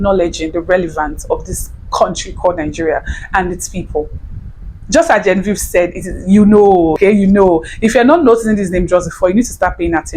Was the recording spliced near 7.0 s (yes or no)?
yes